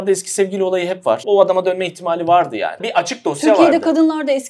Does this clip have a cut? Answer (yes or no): yes